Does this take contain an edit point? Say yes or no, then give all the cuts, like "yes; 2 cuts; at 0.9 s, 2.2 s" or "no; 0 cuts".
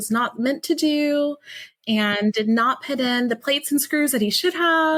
no; 0 cuts